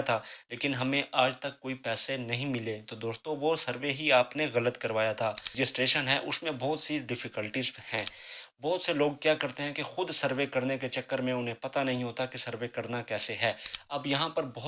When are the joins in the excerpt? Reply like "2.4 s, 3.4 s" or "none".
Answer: 5.5 s

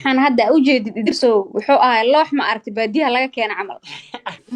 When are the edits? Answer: 1.1 s

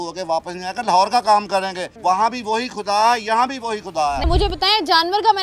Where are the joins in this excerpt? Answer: 1.8 s, 4.3 s

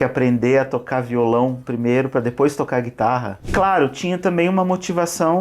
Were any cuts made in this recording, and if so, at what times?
3.5 s

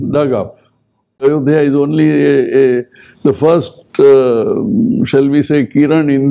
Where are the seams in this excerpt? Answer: 1.2 s

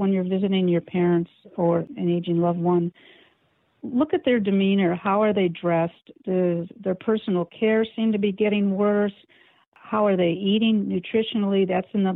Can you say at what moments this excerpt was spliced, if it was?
1.9 s

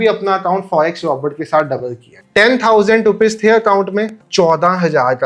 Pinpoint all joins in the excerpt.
2.1 s

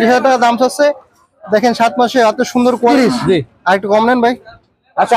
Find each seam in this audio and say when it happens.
2.9 s

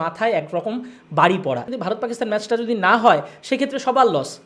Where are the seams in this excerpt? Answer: 1.7 s

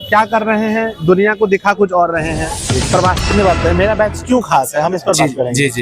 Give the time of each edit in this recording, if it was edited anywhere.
3.3 s

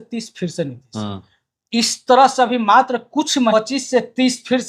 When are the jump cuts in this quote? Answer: 3.5 s

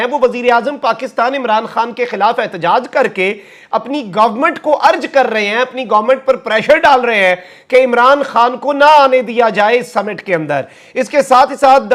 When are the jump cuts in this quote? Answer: none

